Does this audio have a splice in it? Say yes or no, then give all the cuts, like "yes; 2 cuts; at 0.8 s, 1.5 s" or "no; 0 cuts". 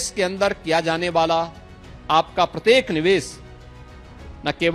no; 0 cuts